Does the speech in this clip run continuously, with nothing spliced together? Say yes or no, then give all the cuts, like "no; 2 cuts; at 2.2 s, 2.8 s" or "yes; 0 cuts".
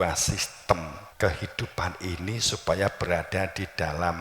no; 1 cut; at 1.0 s